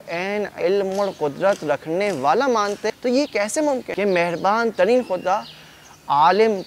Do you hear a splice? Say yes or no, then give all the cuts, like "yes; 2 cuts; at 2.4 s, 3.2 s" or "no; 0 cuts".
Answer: yes; 2 cuts; at 2.9 s, 3.9 s